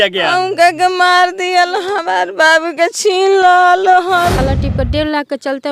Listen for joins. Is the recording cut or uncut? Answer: cut